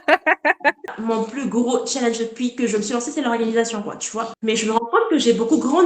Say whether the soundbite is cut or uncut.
cut